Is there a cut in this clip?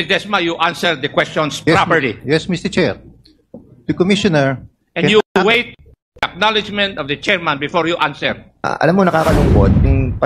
yes; 1 cut; at 8.6 s

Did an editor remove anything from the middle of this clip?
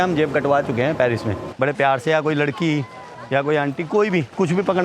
yes; 1 cut; at 1.4 s

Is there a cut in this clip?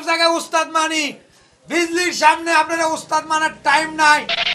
no; 0 cuts

